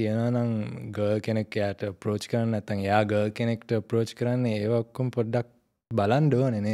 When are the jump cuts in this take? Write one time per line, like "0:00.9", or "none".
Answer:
none